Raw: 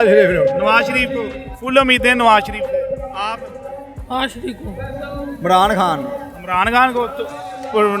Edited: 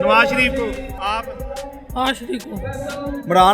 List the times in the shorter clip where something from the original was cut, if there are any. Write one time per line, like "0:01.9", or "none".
0:00.9